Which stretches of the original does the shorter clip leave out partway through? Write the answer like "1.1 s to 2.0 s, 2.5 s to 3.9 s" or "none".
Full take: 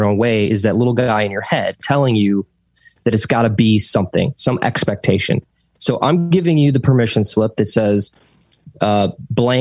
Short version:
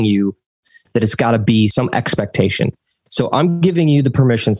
3.8 s to 4.4 s